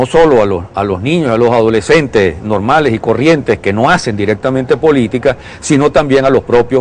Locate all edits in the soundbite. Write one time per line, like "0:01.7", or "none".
none